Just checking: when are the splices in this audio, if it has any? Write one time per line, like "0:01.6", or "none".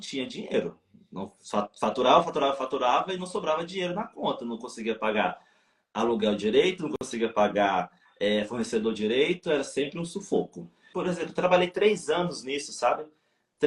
0:10.9